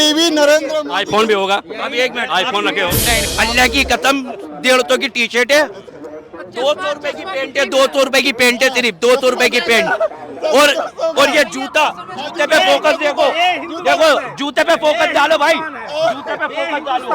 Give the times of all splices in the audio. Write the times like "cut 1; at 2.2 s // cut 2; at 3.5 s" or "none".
cut 1; at 3.3 s